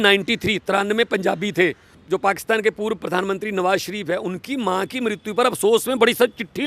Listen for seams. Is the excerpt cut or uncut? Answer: cut